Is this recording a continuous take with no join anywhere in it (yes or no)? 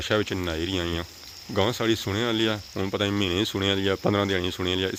yes